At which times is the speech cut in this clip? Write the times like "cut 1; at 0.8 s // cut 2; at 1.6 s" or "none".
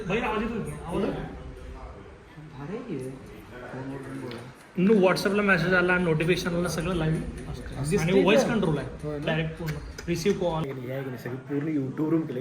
cut 1; at 10.7 s